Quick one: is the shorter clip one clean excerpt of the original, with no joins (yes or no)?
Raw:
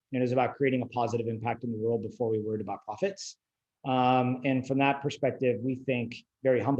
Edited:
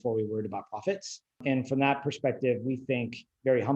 no